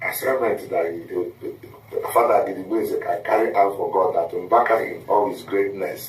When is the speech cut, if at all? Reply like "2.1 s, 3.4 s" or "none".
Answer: 1.0 s